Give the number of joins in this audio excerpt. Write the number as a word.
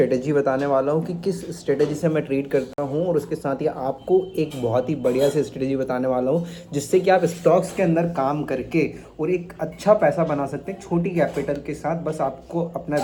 zero